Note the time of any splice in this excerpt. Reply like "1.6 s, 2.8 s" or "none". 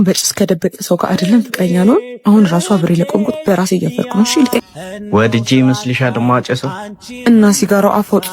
4.6 s